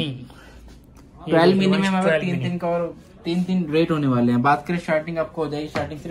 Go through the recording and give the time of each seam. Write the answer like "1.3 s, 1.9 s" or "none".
none